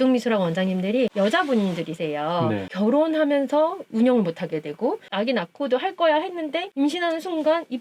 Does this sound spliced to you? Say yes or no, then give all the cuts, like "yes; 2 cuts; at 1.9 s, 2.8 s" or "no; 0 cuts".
no; 0 cuts